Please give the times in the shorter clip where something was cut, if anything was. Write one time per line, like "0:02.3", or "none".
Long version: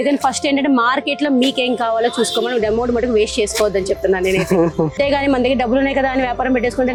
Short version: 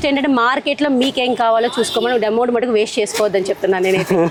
none